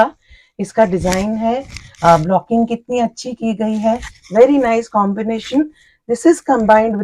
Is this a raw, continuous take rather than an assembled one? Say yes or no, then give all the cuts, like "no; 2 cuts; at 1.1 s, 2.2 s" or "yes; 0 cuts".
yes; 0 cuts